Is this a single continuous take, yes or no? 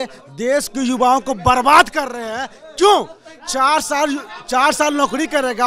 yes